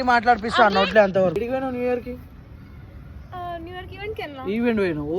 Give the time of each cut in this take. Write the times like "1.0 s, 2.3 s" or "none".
1.4 s